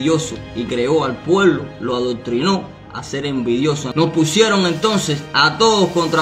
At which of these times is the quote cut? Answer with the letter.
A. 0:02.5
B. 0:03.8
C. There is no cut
B